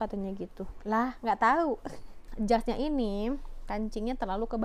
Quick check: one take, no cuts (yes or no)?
no